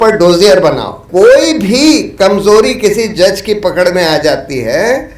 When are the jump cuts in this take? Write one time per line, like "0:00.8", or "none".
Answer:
0:01.0